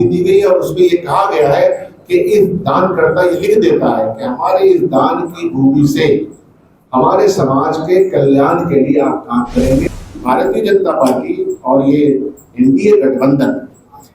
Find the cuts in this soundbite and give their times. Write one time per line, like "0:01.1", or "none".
0:09.8